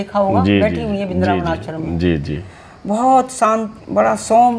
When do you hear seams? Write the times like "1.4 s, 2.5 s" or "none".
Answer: none